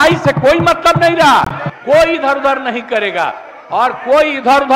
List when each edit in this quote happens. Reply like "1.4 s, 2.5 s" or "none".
1.7 s

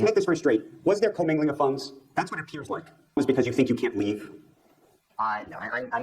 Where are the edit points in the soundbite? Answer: 3.2 s

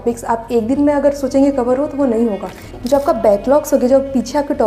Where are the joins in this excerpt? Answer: 2.8 s

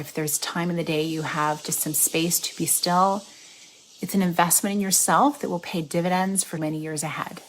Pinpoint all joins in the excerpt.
6.5 s

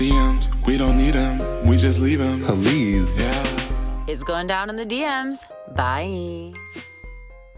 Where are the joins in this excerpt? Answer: none

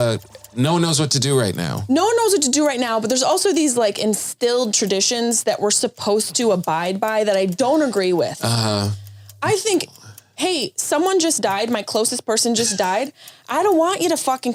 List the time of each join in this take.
none

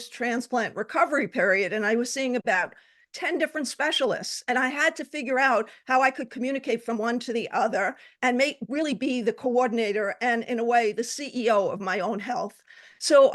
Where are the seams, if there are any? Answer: 2.4 s

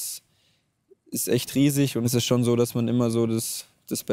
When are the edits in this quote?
2.1 s

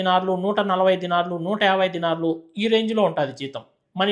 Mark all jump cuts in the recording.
none

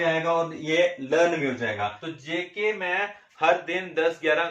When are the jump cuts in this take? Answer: 1.9 s

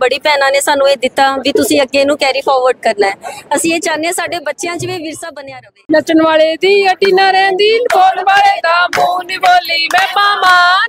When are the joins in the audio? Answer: 5.7 s

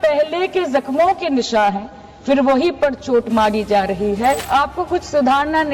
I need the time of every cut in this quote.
4.4 s

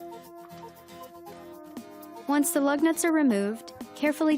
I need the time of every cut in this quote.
2.2 s

